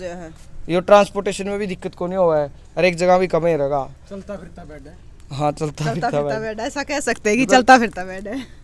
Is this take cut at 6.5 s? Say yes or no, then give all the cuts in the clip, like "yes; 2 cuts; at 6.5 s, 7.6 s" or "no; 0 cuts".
no; 0 cuts